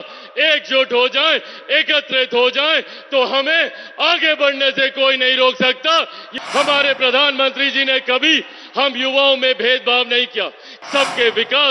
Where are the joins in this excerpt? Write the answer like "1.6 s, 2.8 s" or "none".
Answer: 6.2 s, 10.7 s